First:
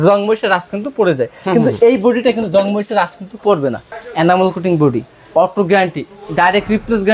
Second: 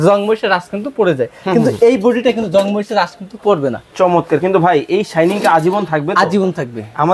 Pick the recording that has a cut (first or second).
first